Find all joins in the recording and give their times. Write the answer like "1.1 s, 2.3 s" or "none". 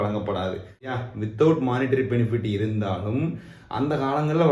0.9 s